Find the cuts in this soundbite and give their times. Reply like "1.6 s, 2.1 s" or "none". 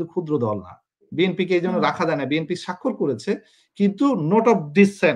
1.2 s